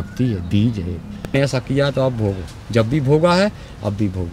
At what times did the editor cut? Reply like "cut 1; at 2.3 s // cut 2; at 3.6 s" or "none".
cut 1; at 1.3 s